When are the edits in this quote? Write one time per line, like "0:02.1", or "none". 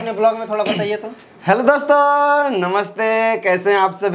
none